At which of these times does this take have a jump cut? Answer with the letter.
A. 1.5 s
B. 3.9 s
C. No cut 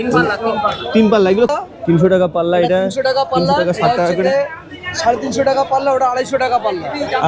A